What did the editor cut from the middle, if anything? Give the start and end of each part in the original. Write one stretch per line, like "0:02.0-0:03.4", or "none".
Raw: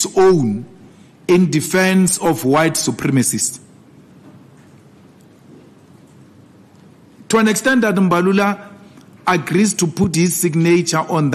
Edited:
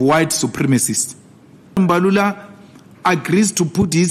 0:04.2-0:08.0